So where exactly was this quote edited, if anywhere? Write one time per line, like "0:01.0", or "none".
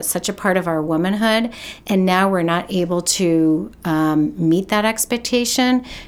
none